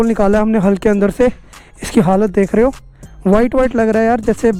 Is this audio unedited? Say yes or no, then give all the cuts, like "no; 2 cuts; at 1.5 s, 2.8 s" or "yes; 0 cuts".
yes; 0 cuts